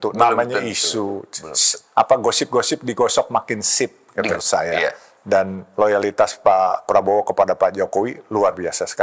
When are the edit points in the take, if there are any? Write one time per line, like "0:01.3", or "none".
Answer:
0:04.3

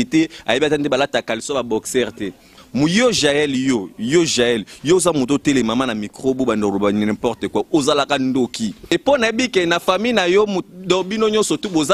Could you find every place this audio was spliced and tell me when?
0:02.5
0:08.8

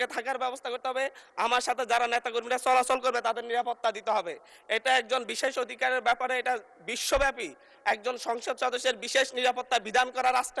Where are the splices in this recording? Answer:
none

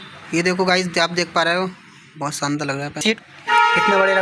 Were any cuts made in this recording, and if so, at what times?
0:03.2

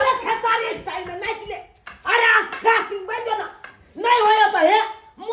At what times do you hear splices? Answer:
none

